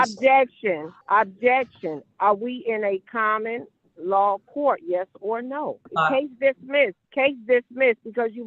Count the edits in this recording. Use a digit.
3